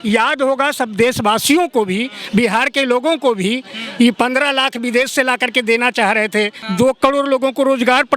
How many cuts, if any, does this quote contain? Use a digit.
1